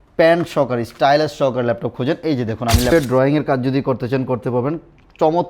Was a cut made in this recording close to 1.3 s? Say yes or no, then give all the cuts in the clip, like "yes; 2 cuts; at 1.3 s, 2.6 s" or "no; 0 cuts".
no; 1 cut; at 2.9 s